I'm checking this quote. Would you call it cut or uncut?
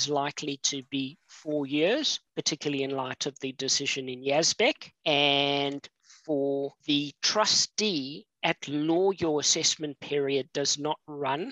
cut